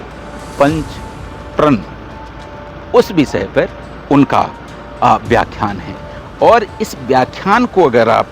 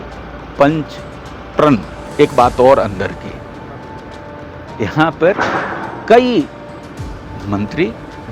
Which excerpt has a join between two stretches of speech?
second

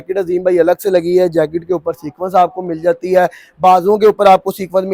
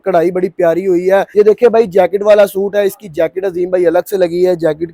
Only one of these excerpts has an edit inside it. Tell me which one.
second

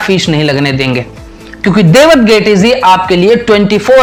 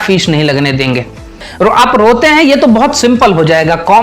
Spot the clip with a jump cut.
second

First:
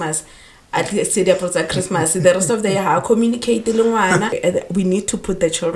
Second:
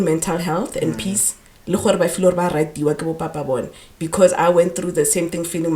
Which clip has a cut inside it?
first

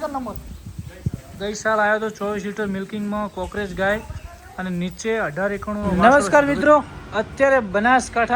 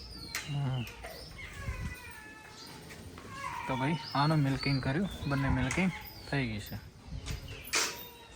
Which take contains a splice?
first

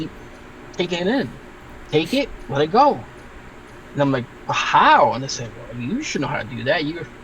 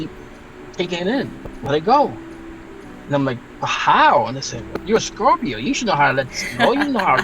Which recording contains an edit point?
second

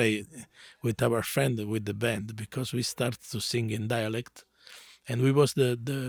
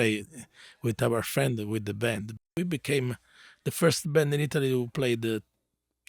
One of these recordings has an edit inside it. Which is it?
second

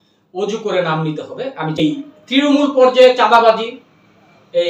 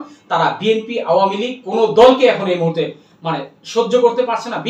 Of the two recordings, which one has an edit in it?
first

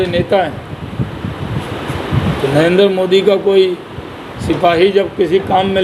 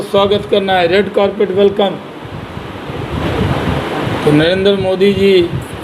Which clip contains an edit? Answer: second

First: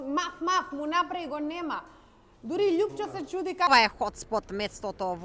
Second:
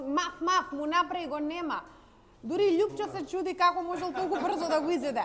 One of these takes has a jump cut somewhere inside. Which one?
first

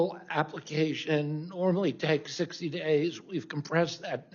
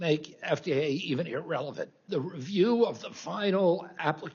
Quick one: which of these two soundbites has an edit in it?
second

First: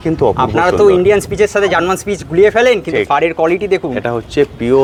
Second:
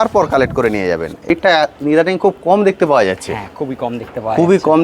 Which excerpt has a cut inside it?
second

